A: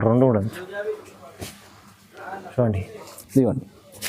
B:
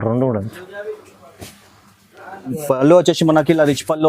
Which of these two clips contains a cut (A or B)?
B